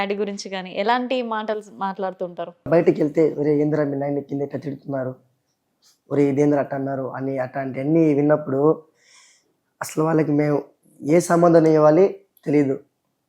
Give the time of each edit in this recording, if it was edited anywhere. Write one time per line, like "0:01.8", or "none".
0:02.7